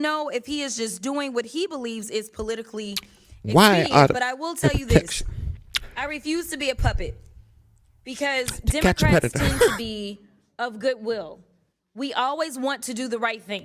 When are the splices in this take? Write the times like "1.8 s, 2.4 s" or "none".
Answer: none